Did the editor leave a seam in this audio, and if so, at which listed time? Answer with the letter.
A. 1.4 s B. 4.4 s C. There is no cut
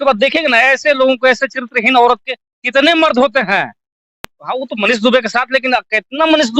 B